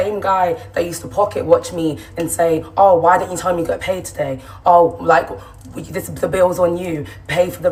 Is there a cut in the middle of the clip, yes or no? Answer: no